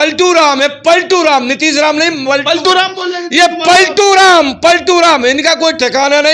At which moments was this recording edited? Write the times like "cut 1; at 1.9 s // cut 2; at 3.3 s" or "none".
none